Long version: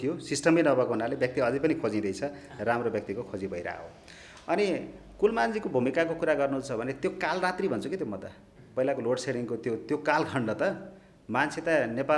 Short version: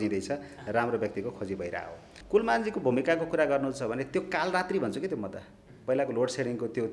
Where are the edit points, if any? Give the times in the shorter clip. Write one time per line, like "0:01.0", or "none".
0:02.1